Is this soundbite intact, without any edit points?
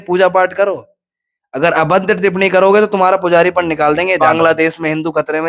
no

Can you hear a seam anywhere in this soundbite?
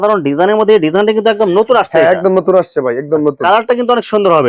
no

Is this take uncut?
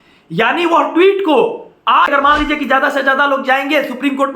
no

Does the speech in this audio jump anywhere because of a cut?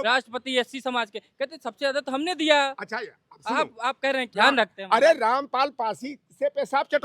yes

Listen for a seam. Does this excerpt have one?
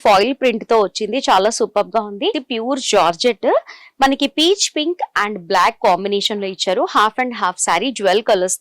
yes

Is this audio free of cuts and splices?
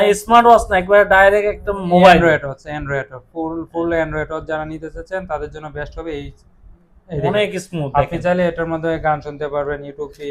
yes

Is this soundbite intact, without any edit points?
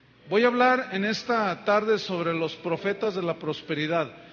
no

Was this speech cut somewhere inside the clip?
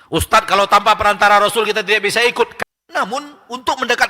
yes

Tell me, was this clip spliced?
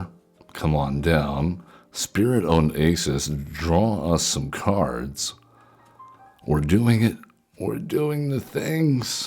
no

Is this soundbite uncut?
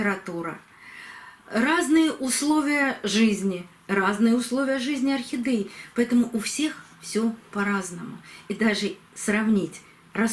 yes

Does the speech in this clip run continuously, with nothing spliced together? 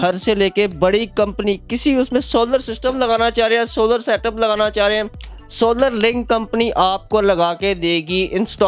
yes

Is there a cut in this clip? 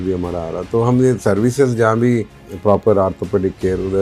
yes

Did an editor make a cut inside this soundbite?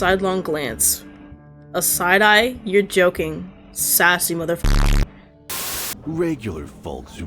yes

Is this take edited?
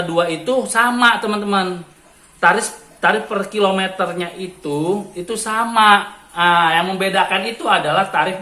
no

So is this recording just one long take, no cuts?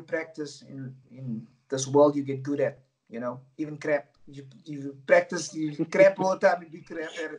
yes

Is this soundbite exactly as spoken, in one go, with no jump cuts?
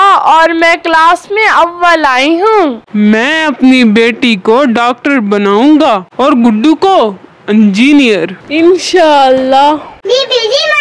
no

